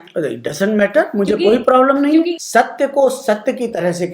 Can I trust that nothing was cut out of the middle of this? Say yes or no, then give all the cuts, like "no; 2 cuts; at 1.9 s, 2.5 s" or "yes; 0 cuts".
no; 1 cut; at 2.4 s